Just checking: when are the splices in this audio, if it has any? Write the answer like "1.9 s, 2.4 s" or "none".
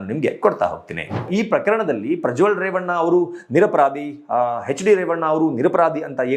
1.3 s